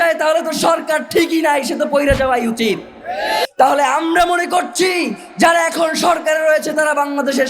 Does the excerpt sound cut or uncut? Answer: cut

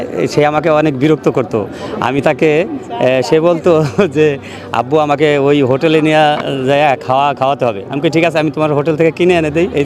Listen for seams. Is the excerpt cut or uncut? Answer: uncut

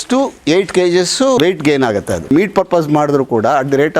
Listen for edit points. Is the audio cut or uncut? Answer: cut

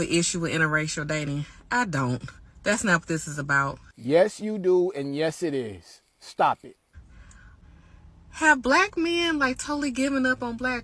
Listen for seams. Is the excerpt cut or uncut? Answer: uncut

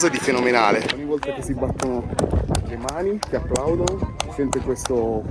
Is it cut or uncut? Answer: cut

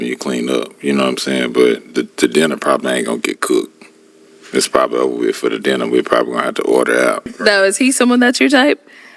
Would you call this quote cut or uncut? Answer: cut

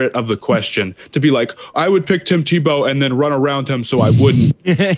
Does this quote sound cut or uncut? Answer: uncut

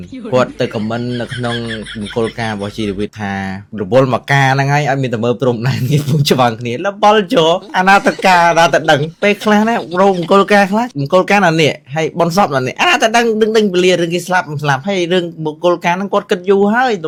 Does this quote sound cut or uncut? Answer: uncut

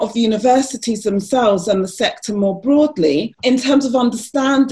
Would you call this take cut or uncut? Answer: cut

